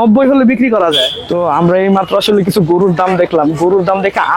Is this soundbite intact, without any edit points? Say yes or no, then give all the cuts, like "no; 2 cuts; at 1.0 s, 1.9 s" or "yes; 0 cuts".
no; 1 cut; at 1.2 s